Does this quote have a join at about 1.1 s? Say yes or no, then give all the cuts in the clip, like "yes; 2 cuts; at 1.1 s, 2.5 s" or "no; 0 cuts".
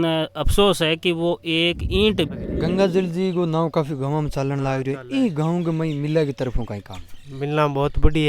no; 1 cut; at 2.3 s